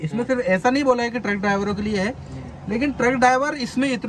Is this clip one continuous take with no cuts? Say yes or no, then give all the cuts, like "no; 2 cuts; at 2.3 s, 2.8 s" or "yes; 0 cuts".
yes; 0 cuts